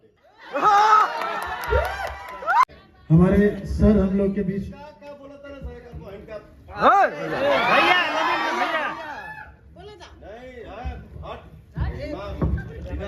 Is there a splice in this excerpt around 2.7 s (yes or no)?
yes